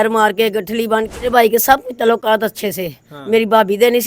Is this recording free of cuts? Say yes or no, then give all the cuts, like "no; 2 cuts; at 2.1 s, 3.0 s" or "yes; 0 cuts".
no; 1 cut; at 1.2 s